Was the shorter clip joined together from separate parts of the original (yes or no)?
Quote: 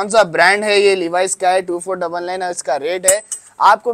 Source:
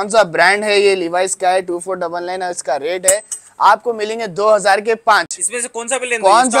no